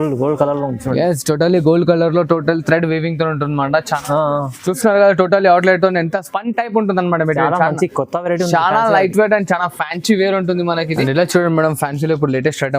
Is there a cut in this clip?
yes; 2 cuts; at 4.0 s, 11.1 s

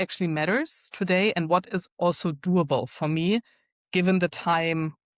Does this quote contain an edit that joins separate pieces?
no; 0 cuts

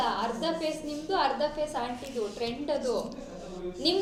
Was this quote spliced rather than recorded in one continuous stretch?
no; 0 cuts

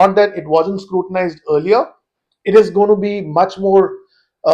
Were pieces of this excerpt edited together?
no; 0 cuts

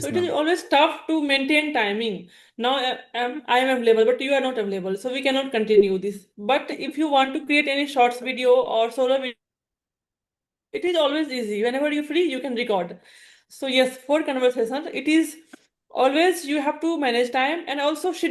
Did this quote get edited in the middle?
no; 0 cuts

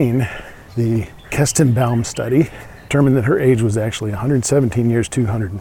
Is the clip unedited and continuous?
no; 2 cuts; at 0.9 s, 2.9 s

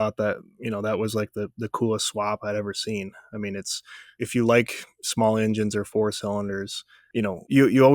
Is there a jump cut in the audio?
no; 0 cuts

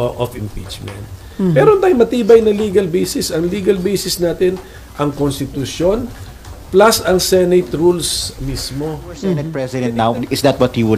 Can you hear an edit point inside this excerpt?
yes; 1 cut; at 9.6 s

